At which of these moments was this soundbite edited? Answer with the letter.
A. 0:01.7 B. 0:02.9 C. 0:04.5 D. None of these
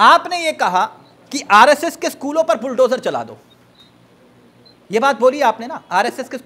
D